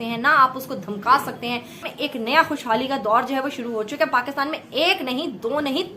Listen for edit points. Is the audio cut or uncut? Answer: cut